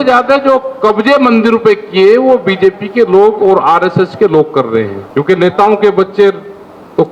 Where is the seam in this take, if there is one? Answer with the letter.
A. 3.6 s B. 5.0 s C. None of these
B